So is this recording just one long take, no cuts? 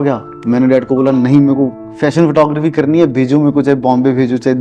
yes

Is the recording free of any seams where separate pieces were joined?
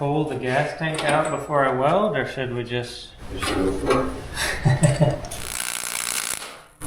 no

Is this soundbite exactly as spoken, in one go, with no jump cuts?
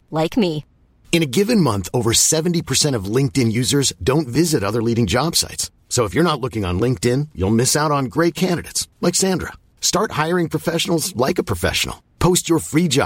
yes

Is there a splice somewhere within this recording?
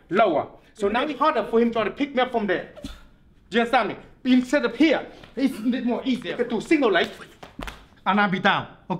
yes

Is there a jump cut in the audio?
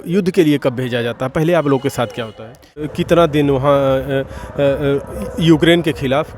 yes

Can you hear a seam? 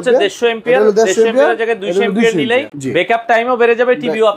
yes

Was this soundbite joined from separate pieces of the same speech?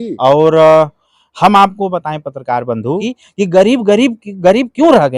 yes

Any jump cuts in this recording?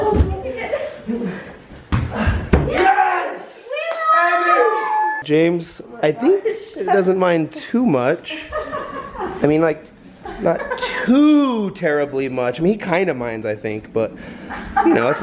yes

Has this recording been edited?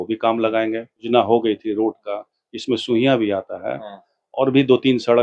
yes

